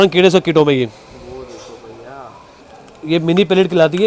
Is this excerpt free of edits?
no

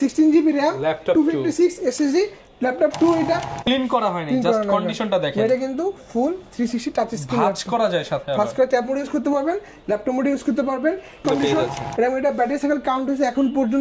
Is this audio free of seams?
no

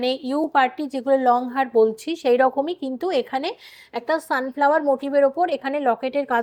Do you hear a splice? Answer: no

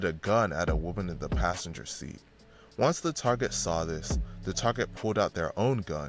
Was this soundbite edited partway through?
no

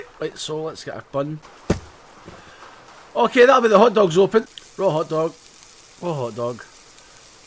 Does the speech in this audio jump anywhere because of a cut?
yes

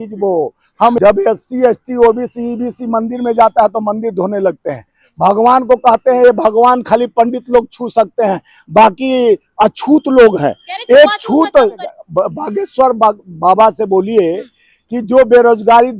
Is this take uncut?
no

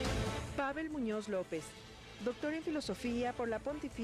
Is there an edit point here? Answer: yes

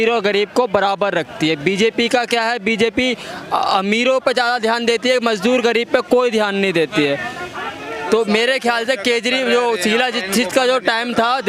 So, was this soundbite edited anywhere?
no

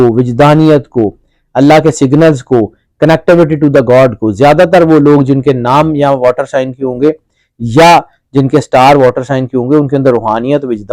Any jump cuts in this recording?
no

